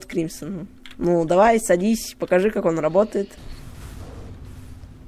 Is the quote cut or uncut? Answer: uncut